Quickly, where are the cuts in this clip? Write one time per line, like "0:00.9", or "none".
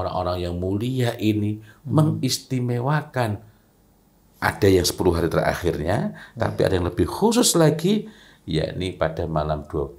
none